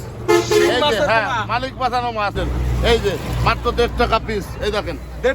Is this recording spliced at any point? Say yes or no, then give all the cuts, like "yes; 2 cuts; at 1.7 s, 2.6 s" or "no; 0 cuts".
yes; 1 cut; at 2.3 s